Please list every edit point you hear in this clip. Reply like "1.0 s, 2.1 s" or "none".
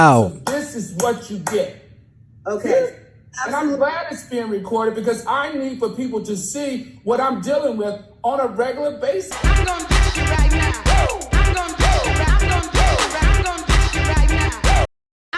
9.3 s